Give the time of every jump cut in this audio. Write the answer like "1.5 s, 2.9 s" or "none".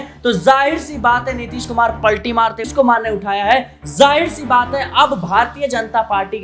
2.7 s